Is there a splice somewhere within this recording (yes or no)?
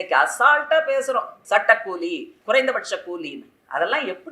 yes